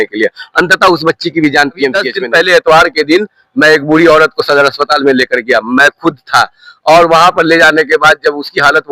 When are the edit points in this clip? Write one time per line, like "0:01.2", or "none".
0:02.1

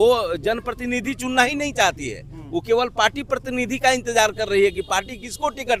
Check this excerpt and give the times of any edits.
none

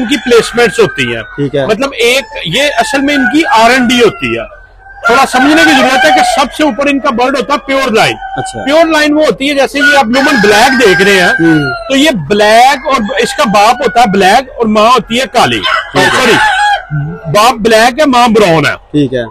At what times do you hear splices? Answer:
none

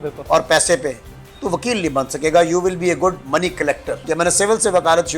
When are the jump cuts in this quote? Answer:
0:04.1

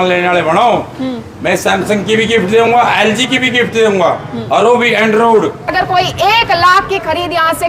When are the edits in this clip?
0:05.7

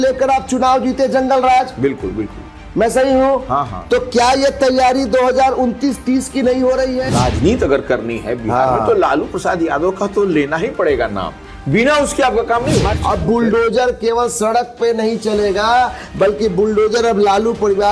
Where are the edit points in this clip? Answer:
0:07.0
0:12.9

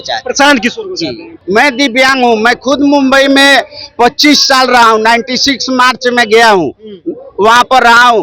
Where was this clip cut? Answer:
0:01.4

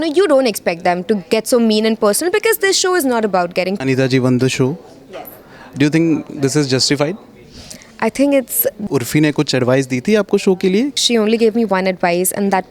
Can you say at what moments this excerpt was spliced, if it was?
0:03.8
0:08.8
0:11.0

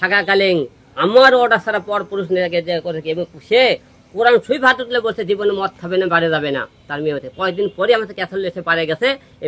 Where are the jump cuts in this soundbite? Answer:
none

